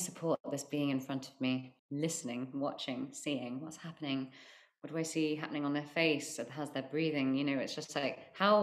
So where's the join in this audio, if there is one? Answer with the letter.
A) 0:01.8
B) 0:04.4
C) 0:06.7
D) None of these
A